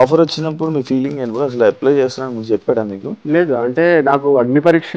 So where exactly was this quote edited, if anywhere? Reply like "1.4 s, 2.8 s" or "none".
3.1 s